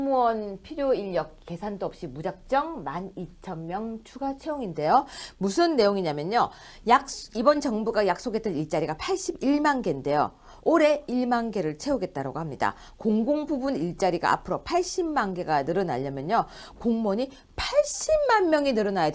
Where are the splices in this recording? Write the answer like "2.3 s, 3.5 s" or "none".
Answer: none